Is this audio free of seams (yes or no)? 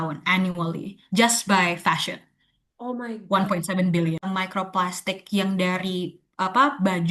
no